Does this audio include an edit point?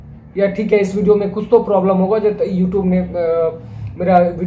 no; 0 cuts

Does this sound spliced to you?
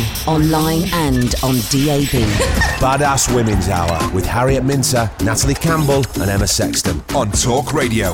no; 0 cuts

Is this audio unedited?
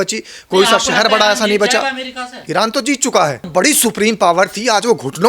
no; 1 cut; at 3.5 s

